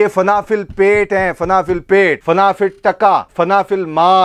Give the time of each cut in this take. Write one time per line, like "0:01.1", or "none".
0:02.2
0:03.3